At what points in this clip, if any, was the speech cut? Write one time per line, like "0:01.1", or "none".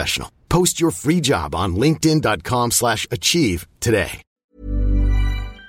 0:04.2